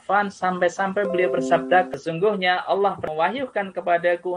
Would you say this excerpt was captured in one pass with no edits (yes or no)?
no